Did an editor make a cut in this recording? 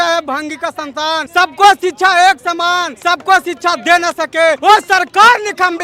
yes; 3 cuts; at 1.2 s, 2.9 s, 4.6 s

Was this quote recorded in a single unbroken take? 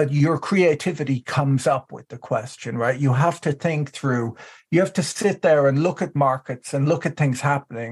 yes; 0 cuts

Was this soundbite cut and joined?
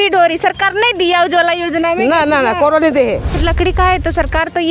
yes; 1 cut; at 3.3 s

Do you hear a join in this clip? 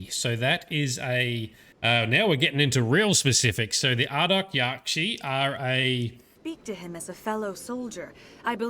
yes; 1 cut; at 6.3 s

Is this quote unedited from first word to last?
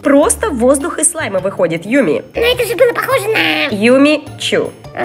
yes; 0 cuts

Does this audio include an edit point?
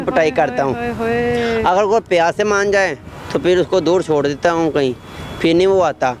no; 0 cuts

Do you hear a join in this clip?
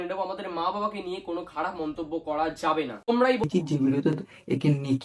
yes; 1 cut; at 3.5 s

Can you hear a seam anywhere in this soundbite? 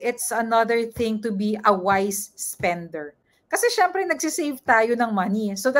no; 0 cuts

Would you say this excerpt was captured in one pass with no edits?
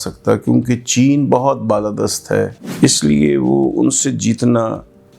no; 1 cut; at 2.6 s

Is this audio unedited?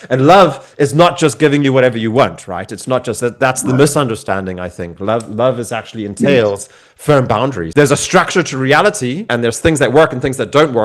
no; 2 cuts; at 7.6 s, 9.3 s

